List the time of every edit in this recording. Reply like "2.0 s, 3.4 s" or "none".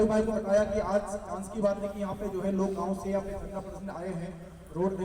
none